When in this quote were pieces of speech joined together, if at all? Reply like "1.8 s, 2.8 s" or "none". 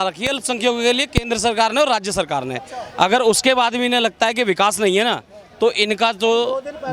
none